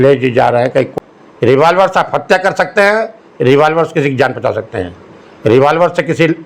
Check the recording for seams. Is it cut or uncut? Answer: cut